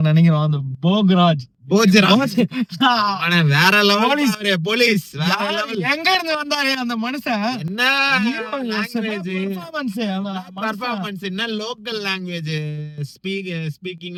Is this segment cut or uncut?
uncut